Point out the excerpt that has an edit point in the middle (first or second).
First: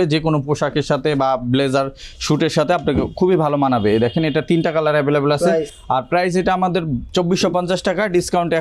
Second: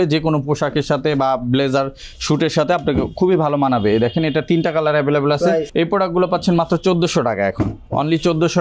second